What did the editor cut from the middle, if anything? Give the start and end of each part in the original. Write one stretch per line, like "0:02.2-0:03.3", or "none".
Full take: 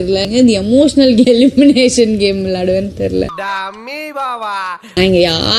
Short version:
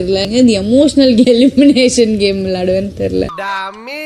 none